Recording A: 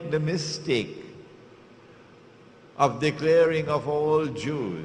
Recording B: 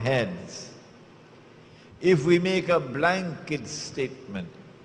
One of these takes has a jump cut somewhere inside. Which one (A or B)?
A